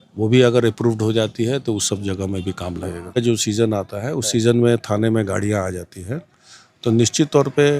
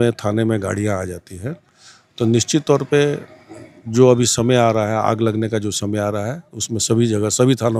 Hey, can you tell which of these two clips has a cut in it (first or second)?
first